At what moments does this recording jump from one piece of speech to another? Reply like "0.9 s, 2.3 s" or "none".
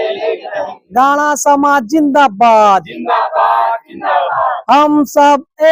none